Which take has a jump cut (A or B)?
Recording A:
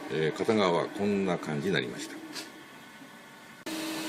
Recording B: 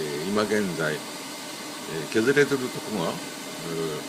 A